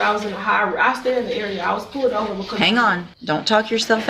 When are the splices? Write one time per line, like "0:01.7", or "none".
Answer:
0:03.1